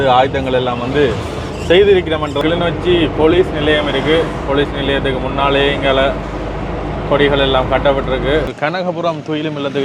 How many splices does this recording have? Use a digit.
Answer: 2